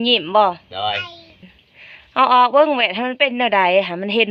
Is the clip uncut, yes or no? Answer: no